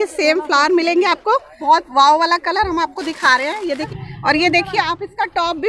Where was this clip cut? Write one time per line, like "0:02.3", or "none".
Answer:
0:01.5
0:03.9